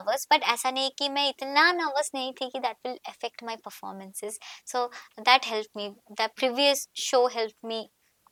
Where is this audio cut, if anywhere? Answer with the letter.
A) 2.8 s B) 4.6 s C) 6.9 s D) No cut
D